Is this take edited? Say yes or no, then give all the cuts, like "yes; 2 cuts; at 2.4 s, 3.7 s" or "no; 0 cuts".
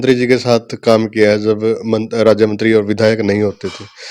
no; 0 cuts